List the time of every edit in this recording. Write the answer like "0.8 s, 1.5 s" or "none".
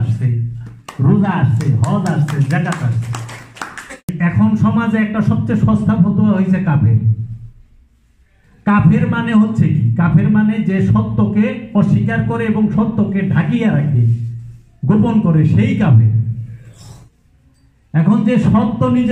4.1 s